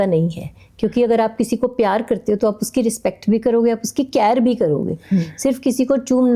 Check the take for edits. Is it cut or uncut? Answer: uncut